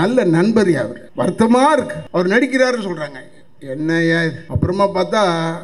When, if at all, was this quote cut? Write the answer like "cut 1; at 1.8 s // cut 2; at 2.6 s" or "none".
cut 1; at 1.0 s // cut 2; at 2.0 s // cut 3; at 4.4 s

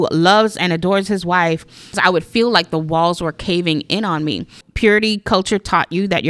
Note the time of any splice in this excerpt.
cut 1; at 2.0 s // cut 2; at 4.6 s

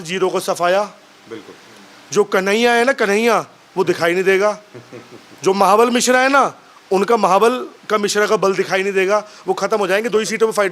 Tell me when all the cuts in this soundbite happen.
none

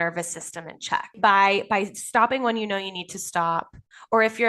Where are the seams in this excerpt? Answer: cut 1; at 1.1 s

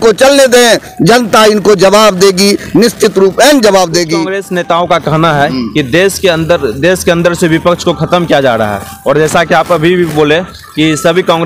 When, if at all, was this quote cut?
none

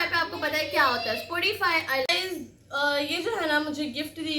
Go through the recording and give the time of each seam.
cut 1; at 2.1 s

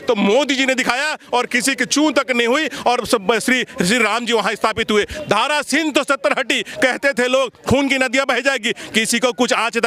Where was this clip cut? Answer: none

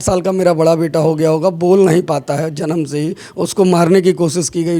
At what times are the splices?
none

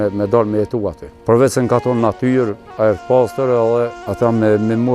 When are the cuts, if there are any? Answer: cut 1; at 1.1 s // cut 2; at 4.0 s

